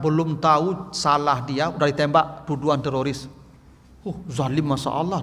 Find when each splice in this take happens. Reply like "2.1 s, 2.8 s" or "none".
none